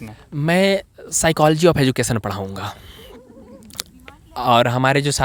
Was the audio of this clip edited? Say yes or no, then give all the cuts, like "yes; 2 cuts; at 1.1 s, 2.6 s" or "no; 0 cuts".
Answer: no; 0 cuts